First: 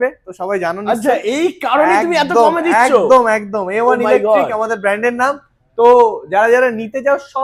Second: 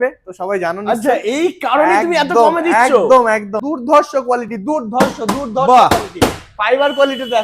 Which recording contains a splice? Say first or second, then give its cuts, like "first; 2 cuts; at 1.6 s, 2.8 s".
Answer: second; 1 cut; at 3.6 s